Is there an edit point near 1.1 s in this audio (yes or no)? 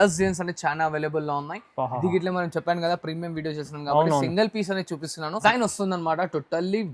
no